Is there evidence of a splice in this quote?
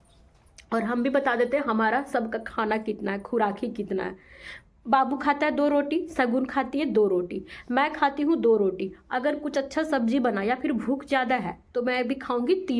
no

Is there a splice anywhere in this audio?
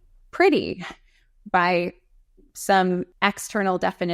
yes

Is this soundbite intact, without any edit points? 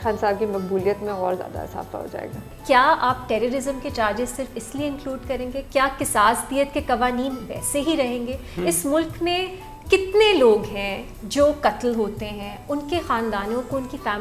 no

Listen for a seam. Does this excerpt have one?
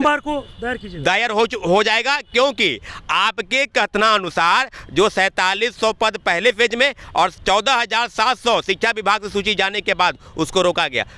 no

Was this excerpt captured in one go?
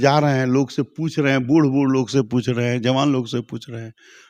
yes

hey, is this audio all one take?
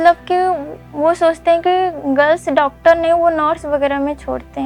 yes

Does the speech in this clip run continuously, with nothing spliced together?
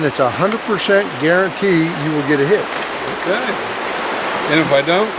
yes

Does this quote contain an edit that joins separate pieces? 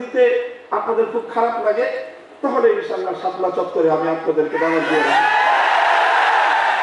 no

